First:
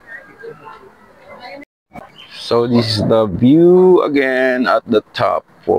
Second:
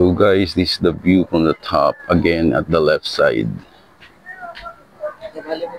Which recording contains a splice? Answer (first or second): first